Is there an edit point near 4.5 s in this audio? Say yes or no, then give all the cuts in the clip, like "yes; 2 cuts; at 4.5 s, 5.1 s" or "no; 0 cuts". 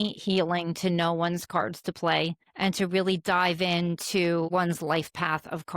yes; 2 cuts; at 2.4 s, 4.5 s